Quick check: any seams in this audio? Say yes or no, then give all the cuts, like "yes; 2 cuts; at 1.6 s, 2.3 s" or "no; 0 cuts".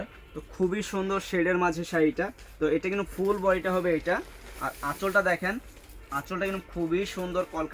no; 0 cuts